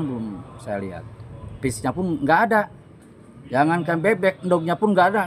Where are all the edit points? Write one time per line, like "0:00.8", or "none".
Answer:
none